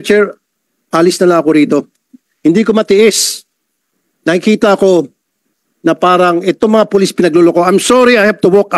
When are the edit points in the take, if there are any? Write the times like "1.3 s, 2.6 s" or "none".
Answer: none

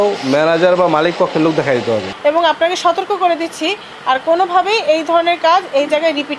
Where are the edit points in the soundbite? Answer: 2.1 s

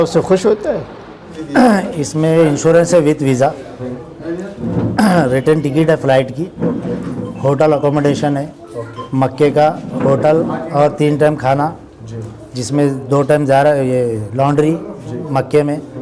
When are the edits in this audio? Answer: 1.3 s

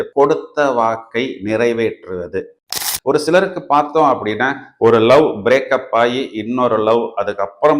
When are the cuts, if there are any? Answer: 2.6 s

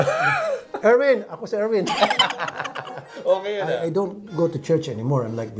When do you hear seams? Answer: 3.7 s

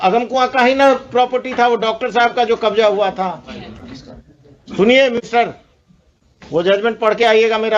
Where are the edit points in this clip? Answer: none

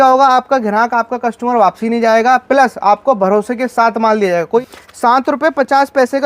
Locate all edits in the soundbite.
4.6 s

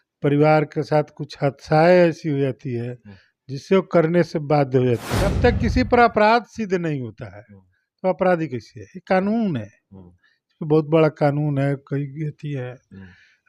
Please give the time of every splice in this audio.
5.3 s

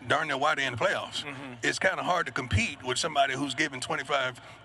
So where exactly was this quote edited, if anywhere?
none

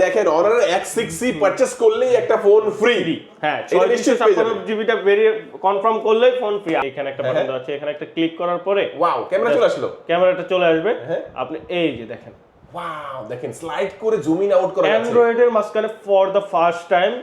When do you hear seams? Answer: 6.8 s

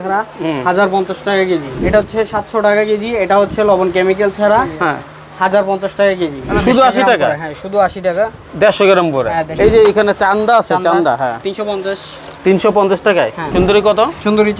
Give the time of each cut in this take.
1.7 s, 6.4 s, 9.5 s, 13.4 s

